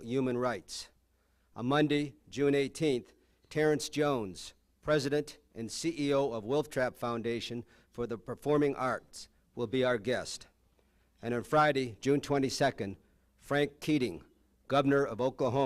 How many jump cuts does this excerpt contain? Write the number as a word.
one